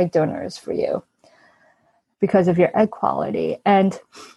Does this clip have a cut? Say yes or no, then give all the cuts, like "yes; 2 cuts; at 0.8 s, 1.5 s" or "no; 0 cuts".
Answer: no; 0 cuts